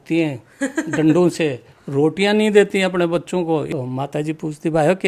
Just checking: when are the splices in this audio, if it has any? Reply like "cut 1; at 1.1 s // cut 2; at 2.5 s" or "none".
cut 1; at 3.7 s